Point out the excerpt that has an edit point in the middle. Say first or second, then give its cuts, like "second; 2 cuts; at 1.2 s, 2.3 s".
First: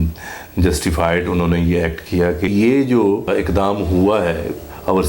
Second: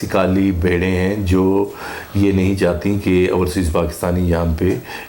first; 2 cuts; at 2.5 s, 3.3 s